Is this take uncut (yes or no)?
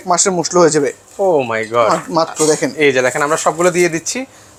yes